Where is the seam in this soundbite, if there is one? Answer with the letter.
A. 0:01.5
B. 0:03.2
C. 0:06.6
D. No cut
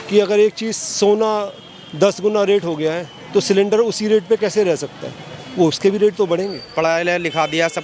C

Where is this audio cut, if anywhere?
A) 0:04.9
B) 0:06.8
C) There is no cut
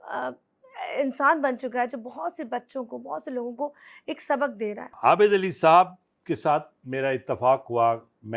A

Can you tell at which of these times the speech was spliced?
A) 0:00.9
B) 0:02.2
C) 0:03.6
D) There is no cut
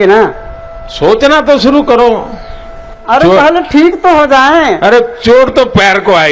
D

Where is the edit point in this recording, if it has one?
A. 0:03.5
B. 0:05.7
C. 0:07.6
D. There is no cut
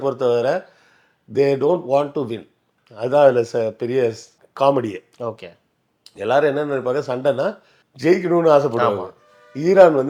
D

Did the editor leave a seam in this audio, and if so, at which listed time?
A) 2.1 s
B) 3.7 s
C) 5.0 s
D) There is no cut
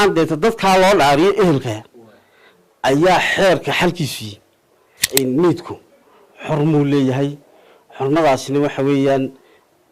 C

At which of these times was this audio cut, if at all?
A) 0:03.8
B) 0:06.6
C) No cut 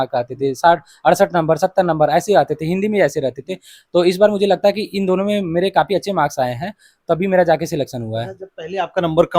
C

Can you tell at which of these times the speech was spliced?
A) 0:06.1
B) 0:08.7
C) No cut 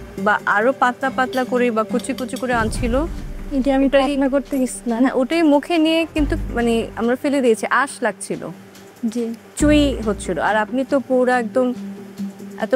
C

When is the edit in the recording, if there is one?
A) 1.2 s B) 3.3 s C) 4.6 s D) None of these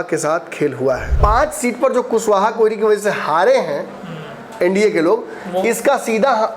A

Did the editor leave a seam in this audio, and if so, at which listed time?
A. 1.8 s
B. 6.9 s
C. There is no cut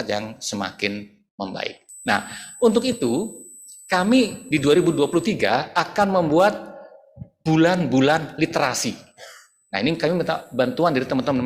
A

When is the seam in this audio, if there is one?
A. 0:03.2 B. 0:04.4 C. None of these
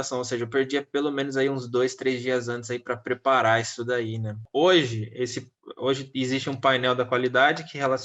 B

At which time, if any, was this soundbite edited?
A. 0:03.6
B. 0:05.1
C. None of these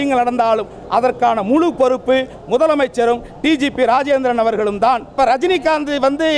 B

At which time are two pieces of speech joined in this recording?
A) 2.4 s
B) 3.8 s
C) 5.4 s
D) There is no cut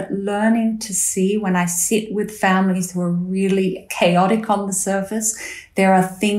B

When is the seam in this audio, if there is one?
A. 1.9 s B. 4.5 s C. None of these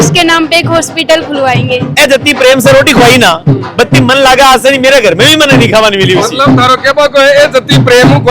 A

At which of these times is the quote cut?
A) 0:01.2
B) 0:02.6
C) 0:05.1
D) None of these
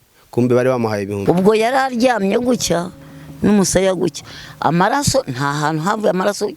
A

